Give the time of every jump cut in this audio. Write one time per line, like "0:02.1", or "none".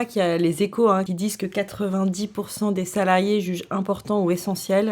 0:01.1